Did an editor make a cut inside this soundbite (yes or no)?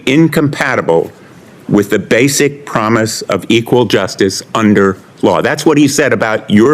no